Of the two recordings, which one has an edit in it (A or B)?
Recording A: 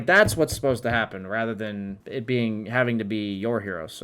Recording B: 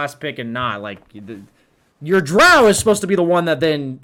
A